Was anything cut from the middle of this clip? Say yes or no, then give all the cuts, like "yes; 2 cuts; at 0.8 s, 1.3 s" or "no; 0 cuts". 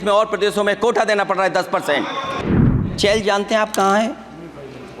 yes; 1 cut; at 2.8 s